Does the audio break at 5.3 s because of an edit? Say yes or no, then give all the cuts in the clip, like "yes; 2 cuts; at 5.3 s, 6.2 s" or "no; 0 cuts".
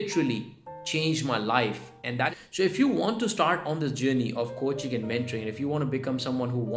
no; 1 cut; at 2.3 s